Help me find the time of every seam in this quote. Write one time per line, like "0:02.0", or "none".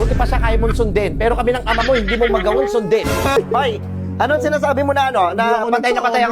0:03.4